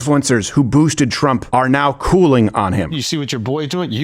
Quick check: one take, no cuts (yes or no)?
no